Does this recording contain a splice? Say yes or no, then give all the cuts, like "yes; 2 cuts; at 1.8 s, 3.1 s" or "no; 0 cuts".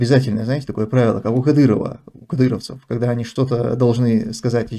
no; 0 cuts